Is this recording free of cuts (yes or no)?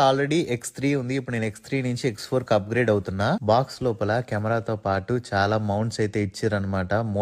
yes